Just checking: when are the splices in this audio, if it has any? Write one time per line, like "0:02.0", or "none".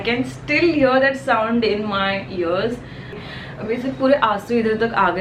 0:03.2